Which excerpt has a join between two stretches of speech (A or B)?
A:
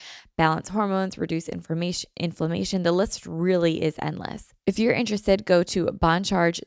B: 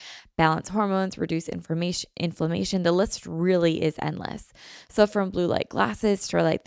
A